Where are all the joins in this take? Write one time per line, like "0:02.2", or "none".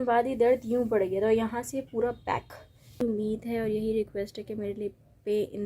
0:03.0